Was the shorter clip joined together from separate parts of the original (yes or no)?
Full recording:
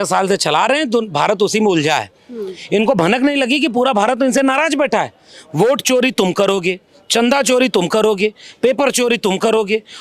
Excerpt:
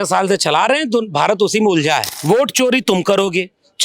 yes